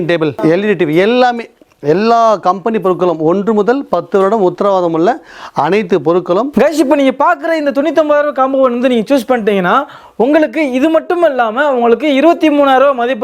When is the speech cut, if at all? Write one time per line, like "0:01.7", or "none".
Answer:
0:06.5